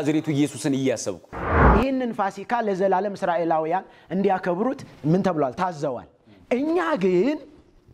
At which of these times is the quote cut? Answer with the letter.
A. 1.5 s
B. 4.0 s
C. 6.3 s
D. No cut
A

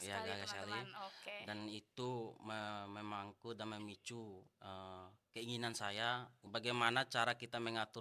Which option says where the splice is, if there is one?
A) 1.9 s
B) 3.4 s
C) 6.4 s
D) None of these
C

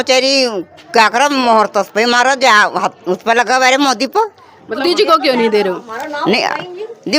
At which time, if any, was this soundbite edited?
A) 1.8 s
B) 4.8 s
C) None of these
B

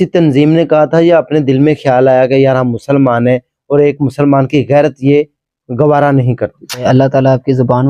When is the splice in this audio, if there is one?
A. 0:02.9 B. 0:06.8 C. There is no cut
B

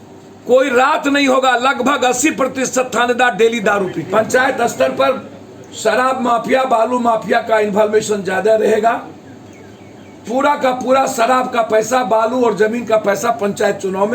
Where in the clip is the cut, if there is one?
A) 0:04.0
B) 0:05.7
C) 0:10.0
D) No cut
A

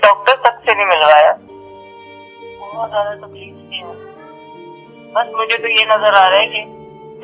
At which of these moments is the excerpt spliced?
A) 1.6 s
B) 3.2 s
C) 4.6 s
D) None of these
A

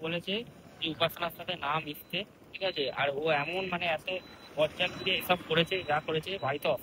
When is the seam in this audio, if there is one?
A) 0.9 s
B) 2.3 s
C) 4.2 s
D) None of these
D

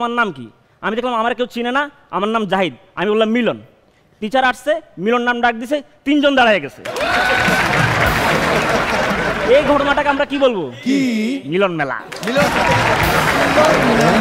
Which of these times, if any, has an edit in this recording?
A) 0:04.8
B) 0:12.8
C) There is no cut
C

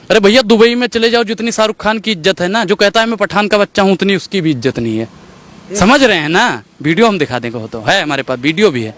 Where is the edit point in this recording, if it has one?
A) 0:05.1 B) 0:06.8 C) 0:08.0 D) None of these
D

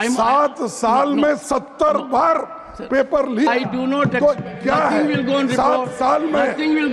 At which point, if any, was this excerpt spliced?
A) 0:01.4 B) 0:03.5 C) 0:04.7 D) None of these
B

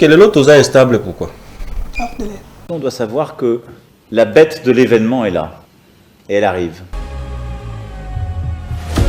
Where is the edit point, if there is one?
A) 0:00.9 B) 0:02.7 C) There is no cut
B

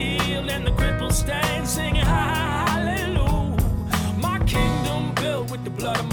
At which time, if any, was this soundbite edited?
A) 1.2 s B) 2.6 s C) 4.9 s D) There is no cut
D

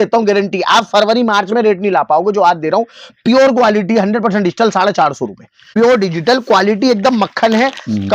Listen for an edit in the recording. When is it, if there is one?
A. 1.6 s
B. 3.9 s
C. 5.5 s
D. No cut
C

